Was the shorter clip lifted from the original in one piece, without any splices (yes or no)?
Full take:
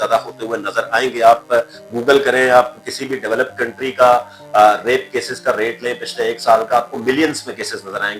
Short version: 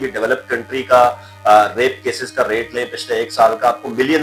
yes